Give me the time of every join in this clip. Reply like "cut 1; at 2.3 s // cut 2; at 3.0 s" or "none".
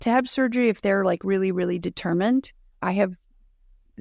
none